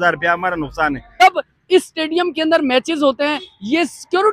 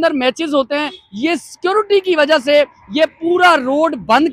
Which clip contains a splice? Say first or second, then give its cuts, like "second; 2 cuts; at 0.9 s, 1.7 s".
first; 1 cut; at 1.1 s